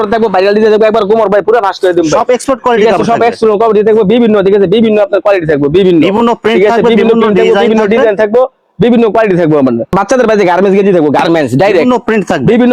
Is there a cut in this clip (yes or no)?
yes